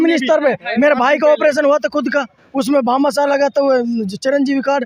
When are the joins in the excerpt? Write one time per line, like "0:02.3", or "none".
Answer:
none